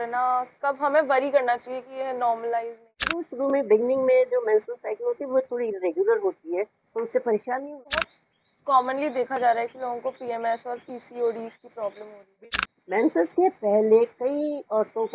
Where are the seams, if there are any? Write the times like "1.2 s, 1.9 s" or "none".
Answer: 3.3 s, 8.0 s, 12.4 s